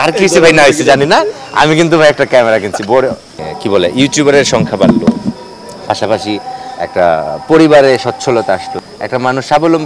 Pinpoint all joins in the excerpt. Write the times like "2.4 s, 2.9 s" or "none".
3.3 s, 8.8 s

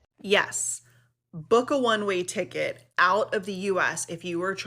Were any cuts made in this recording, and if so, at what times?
none

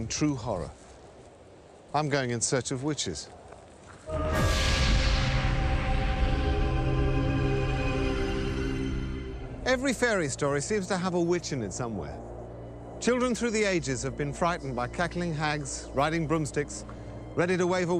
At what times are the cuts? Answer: 16.5 s

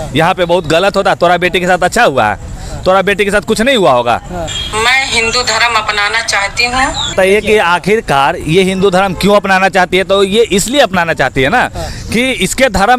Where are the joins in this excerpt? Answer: 4.4 s, 7.1 s

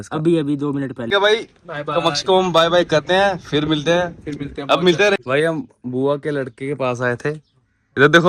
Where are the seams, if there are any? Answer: 1.0 s, 5.2 s

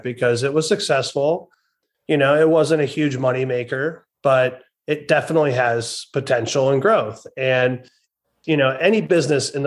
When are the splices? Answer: none

